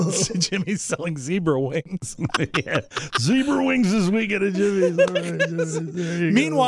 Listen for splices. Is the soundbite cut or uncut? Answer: uncut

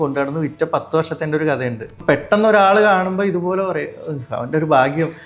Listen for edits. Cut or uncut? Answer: cut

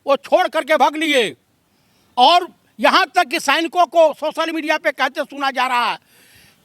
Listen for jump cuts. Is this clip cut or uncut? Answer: uncut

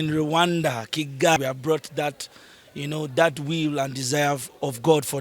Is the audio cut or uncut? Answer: cut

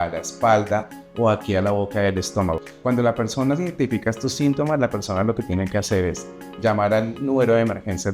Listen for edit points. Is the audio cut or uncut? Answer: cut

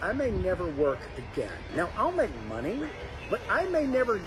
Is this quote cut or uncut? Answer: uncut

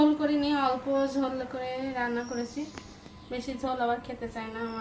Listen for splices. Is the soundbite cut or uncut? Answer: uncut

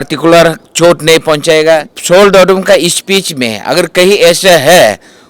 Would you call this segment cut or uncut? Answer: cut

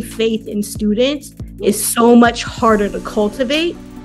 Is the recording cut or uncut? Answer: uncut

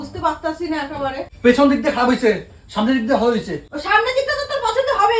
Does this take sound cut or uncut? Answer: cut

